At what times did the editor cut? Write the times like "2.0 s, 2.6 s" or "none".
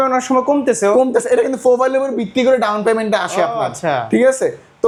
none